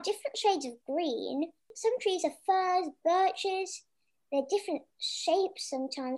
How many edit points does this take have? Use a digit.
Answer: 1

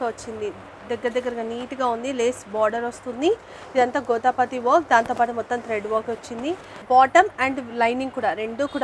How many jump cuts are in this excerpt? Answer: 1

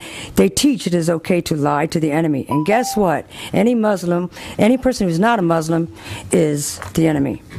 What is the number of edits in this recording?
1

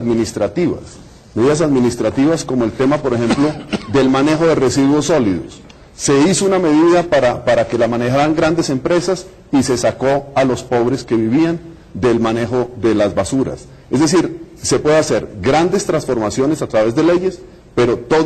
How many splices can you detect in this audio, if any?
1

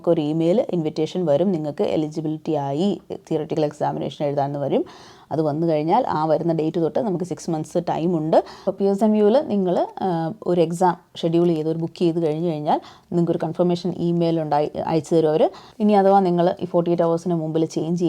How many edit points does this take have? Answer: 2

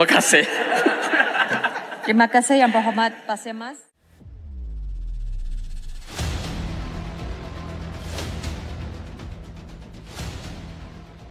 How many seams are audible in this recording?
0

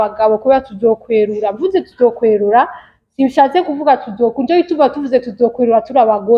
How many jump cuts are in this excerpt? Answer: 0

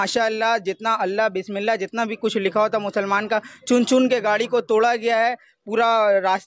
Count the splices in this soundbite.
0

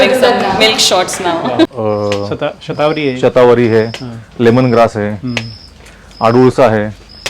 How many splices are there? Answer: 1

